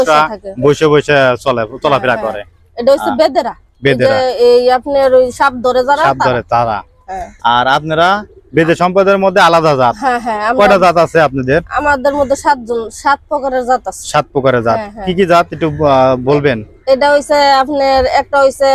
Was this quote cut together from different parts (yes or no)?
no